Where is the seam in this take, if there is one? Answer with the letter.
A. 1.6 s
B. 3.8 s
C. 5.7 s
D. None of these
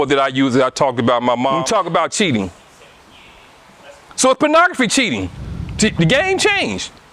A